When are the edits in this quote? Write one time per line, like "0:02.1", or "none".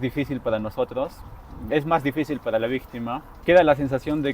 0:03.4